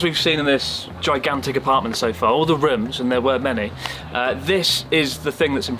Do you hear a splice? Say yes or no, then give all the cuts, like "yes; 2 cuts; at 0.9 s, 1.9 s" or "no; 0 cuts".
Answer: no; 0 cuts